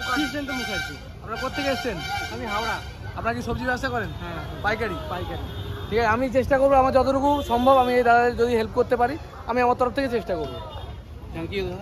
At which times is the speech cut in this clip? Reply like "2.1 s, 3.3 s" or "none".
none